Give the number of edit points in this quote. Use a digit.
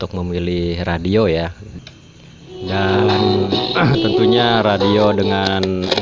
1